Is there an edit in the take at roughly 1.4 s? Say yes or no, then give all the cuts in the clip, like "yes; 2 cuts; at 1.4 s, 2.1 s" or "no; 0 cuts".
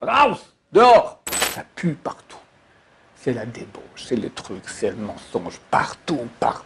yes; 1 cut; at 1.4 s